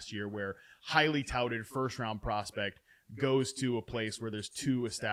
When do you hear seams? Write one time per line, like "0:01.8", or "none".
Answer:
none